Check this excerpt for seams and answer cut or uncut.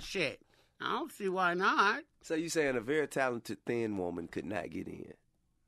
cut